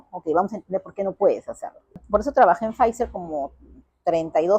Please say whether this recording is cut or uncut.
cut